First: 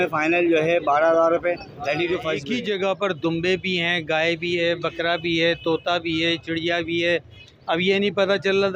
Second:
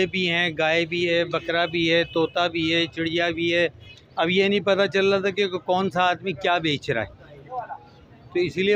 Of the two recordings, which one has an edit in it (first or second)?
first